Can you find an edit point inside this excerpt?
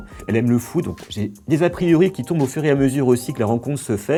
no; 0 cuts

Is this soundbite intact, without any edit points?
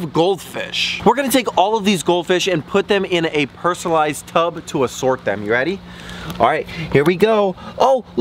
yes; 0 cuts

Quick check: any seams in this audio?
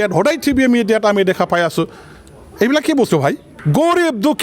yes; 1 cut; at 3.5 s

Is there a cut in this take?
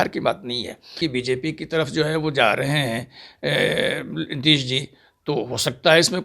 yes; 1 cut; at 1.0 s

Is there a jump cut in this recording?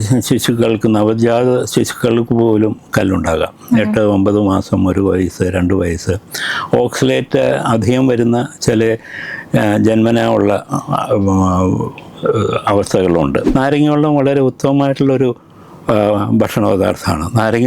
yes; 1 cut; at 13.5 s

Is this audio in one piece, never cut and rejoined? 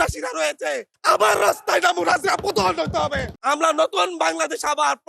no; 1 cut; at 0.9 s

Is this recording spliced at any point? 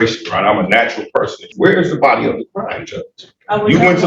yes; 1 cut; at 1.5 s

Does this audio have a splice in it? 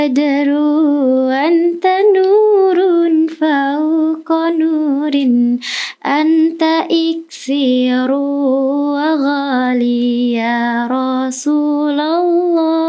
no; 0 cuts

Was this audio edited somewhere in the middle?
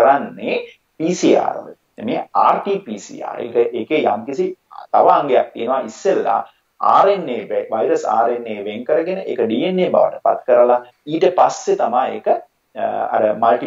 no; 0 cuts

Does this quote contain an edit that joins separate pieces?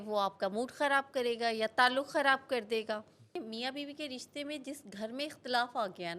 yes; 1 cut; at 3.4 s

